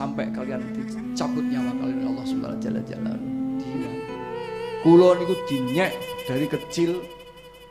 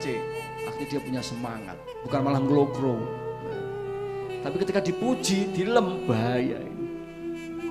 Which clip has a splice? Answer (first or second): first